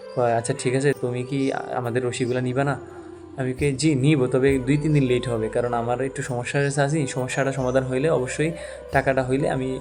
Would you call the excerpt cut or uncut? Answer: cut